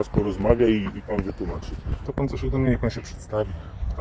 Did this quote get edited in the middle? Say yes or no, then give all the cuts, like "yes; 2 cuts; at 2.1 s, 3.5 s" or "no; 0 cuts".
yes; 1 cut; at 2.0 s